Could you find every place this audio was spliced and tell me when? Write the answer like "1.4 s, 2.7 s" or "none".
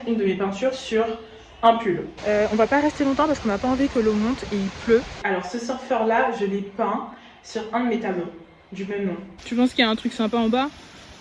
2.1 s, 5.2 s, 9.3 s